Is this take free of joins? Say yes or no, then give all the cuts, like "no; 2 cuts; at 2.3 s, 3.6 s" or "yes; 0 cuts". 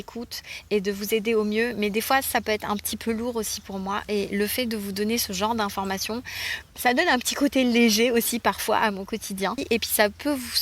no; 1 cut; at 9.6 s